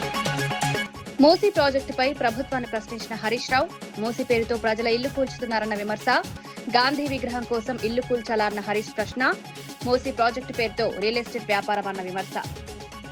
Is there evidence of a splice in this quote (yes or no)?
yes